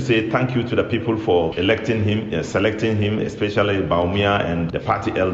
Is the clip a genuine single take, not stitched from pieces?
yes; 0 cuts

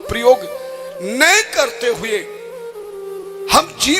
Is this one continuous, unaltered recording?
yes; 0 cuts

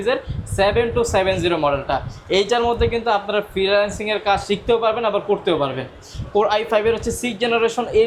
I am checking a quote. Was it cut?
no; 0 cuts

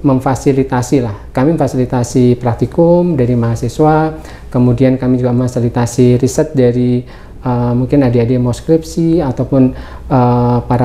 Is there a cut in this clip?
no; 0 cuts

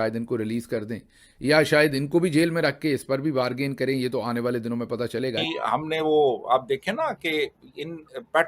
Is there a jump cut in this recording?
yes; 1 cut; at 5.4 s

